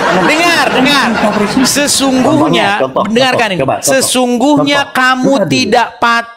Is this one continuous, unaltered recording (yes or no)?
yes